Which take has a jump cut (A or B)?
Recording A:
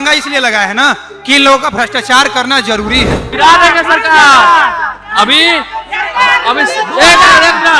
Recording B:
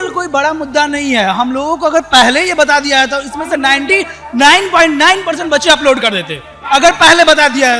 A